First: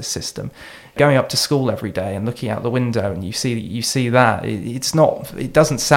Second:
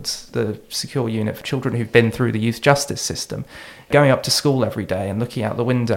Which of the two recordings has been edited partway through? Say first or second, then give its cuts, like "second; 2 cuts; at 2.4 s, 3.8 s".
second; 1 cut; at 1.4 s